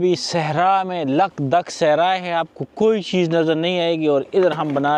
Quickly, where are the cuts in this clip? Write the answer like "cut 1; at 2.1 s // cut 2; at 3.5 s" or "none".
none

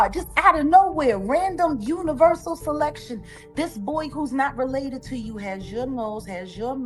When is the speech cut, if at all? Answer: none

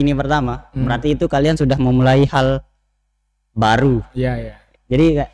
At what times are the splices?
none

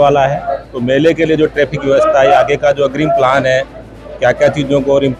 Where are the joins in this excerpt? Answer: none

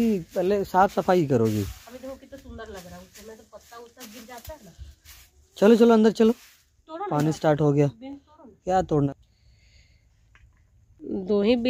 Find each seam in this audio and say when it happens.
none

